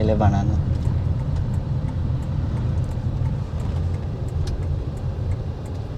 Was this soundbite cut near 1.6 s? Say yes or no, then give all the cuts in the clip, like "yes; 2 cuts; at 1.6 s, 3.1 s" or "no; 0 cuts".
no; 0 cuts